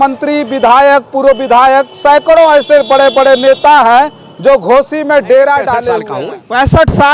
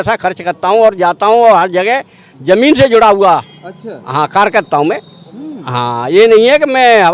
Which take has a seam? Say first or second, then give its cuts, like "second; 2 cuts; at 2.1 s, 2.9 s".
first; 1 cut; at 6.0 s